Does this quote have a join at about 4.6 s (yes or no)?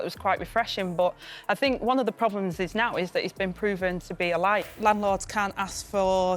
yes